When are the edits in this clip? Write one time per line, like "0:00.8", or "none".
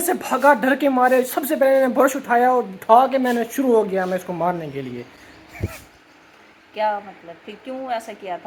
none